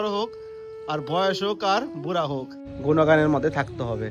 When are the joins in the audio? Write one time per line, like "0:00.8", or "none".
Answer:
0:02.7